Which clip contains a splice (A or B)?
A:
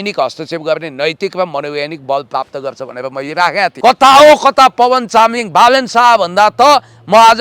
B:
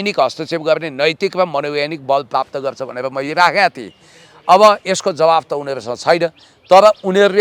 A